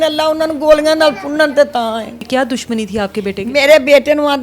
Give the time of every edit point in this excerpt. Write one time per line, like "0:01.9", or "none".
0:02.3